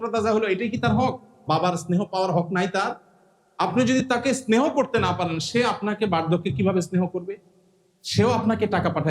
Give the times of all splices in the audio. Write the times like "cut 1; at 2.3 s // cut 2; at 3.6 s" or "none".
cut 1; at 1.3 s